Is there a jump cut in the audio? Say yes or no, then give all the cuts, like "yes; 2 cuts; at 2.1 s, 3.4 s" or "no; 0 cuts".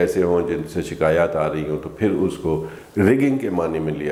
no; 0 cuts